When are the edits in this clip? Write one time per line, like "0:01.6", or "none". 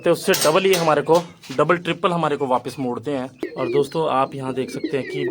0:03.4